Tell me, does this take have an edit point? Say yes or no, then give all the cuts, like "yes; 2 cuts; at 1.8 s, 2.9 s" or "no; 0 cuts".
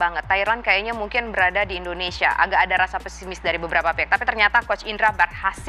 no; 0 cuts